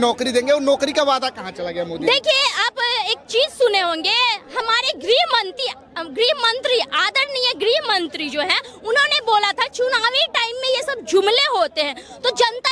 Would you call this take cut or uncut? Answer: uncut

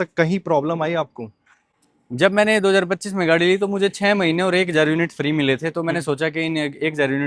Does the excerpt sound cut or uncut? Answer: uncut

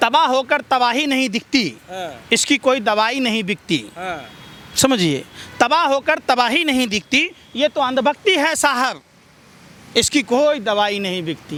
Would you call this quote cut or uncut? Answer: uncut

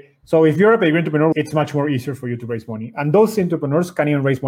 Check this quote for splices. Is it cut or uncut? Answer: cut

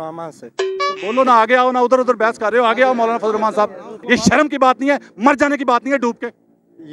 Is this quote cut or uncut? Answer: cut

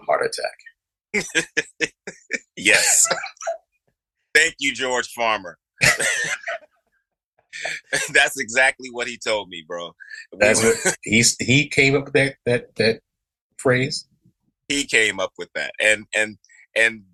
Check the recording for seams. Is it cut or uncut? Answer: uncut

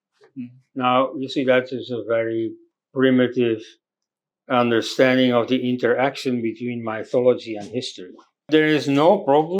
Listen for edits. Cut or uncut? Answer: cut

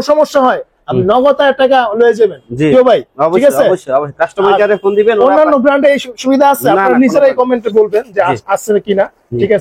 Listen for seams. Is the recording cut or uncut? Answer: uncut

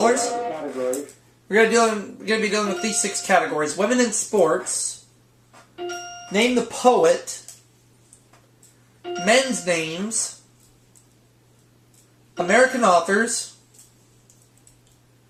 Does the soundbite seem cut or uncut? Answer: uncut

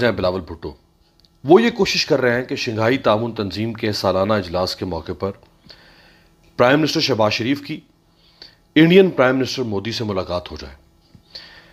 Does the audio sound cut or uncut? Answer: uncut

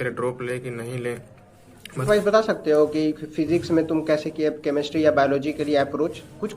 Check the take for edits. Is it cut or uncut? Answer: cut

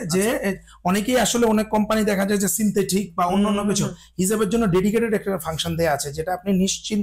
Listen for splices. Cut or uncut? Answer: uncut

